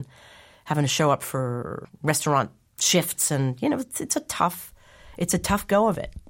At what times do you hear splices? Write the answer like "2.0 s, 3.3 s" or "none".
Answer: 1.9 s